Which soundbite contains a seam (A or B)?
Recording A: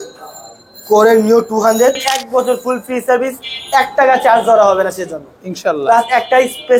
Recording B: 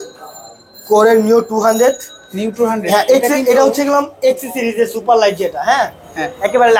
A